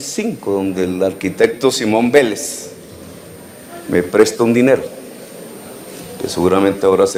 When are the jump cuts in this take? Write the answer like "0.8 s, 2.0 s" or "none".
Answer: none